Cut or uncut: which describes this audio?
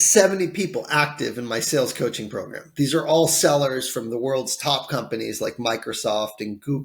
uncut